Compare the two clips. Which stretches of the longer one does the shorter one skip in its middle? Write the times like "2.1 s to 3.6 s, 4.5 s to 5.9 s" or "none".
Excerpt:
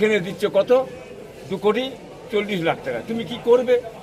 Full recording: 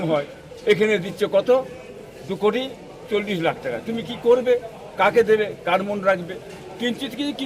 none